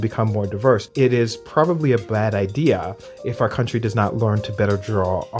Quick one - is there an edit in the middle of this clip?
no; 0 cuts

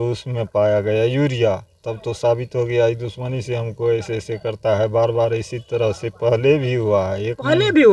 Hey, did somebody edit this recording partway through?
no; 0 cuts

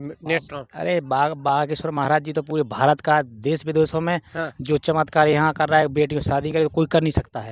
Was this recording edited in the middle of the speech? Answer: no; 0 cuts

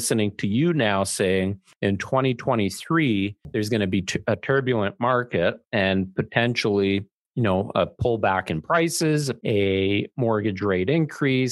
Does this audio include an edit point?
yes; 4 cuts; at 1.6 s, 3.4 s, 7.2 s, 9.3 s

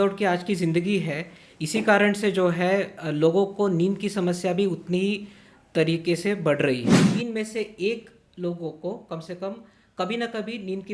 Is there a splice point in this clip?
yes; 1 cut; at 7.0 s

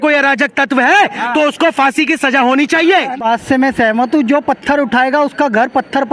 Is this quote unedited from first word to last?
no; 1 cut; at 3.2 s

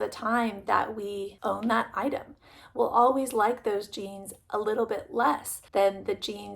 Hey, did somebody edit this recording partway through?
yes; 2 cuts; at 1.3 s, 5.5 s

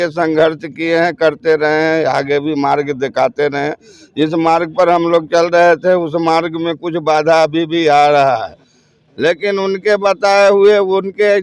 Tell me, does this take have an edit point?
no; 0 cuts

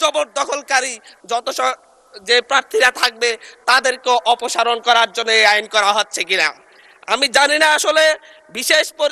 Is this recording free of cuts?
yes; 0 cuts

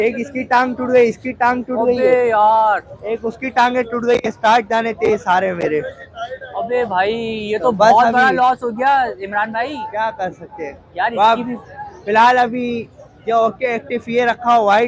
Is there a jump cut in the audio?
no; 0 cuts

